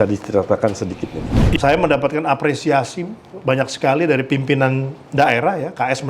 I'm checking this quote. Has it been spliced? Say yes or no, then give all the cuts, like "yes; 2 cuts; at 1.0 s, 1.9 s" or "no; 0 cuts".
yes; 1 cut; at 1.6 s